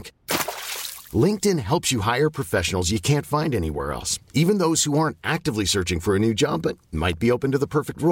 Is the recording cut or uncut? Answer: uncut